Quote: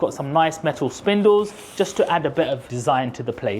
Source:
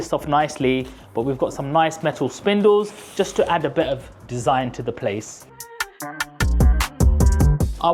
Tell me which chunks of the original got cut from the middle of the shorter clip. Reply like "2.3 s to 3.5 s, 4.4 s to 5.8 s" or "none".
4.1 s to 4.3 s